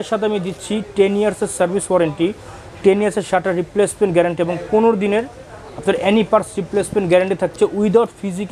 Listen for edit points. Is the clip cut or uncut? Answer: uncut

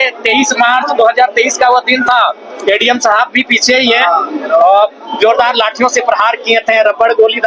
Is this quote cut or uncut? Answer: uncut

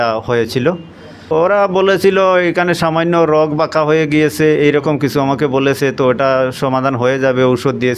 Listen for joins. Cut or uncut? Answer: cut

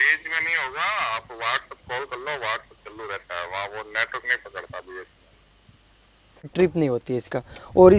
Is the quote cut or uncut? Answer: cut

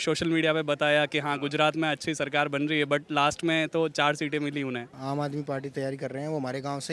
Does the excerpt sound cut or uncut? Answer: cut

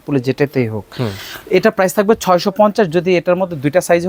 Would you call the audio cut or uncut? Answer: uncut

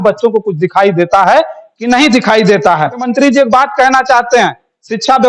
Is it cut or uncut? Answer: cut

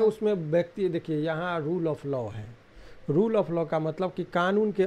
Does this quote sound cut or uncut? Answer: uncut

